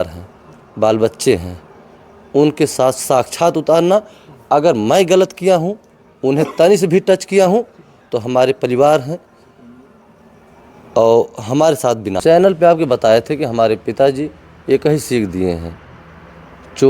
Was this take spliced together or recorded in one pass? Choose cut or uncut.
cut